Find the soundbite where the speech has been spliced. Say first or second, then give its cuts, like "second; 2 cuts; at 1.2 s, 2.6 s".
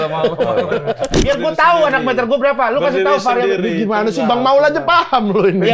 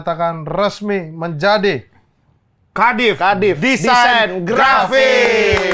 first; 1 cut; at 1.2 s